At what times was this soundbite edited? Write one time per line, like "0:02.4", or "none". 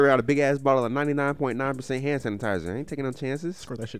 none